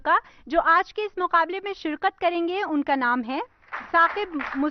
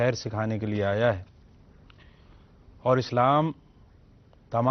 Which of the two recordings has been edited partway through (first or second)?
first